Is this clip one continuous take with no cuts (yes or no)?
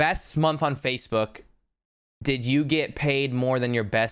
yes